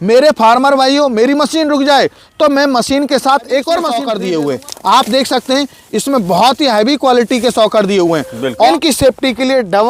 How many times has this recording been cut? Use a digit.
2